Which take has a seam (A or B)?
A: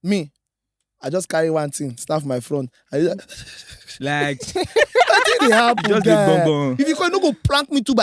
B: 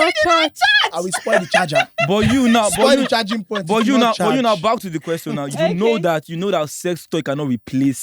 B